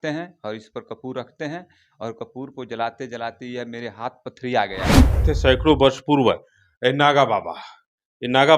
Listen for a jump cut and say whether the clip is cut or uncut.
cut